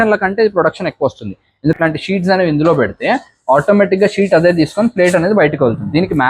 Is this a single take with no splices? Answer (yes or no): no